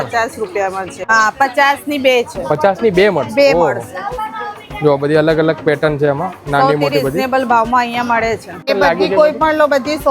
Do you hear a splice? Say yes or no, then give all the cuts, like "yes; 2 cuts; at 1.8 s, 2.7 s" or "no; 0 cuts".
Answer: yes; 2 cuts; at 1.0 s, 8.6 s